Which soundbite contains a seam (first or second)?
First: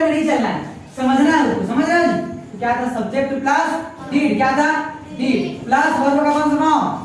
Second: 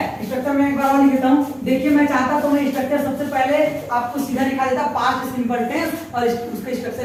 first